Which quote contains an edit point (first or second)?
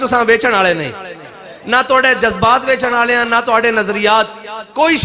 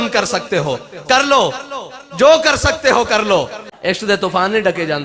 second